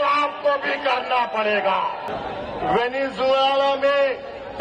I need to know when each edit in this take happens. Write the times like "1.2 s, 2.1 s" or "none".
2.1 s